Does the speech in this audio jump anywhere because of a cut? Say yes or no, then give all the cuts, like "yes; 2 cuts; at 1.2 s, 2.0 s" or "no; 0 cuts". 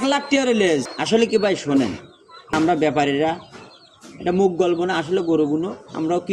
yes; 2 cuts; at 0.9 s, 2.5 s